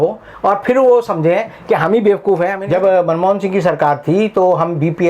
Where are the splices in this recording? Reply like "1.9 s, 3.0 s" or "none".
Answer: 2.6 s

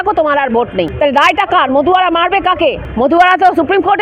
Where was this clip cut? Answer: 0.9 s, 2.8 s

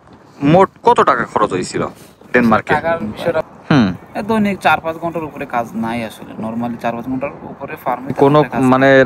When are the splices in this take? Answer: 3.4 s, 8.2 s

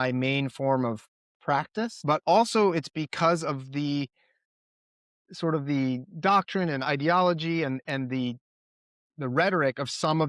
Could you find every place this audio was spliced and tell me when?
2.0 s

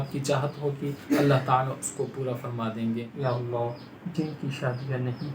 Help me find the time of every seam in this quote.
3.1 s

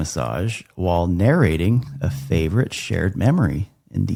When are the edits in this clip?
none

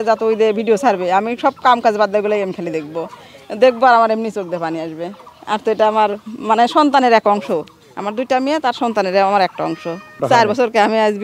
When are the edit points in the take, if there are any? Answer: 10.1 s

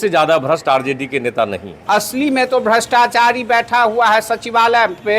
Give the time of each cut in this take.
1.7 s

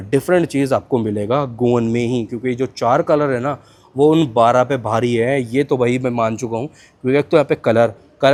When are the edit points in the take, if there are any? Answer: none

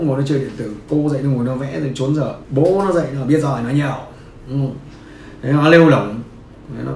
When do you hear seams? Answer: 2.4 s

